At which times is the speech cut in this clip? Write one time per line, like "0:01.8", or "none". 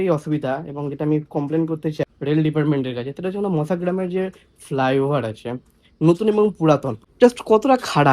0:02.0
0:07.0